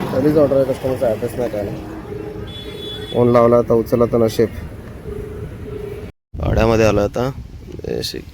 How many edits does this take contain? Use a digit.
1